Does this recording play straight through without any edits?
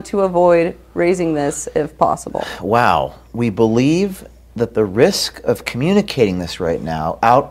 yes; 0 cuts

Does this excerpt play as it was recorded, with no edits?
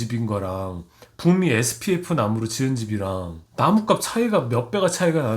no; 1 cut; at 3.4 s

